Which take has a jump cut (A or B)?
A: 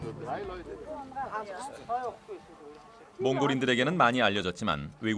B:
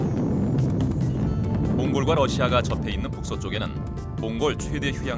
B